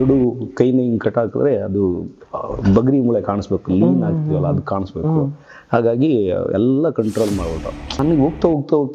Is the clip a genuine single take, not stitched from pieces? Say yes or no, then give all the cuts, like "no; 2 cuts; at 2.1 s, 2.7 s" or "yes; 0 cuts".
no; 1 cut; at 8.0 s